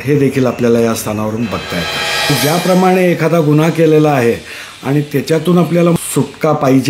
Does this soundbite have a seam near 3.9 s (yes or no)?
no